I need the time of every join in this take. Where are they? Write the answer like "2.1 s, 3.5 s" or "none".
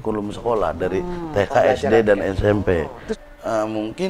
3.0 s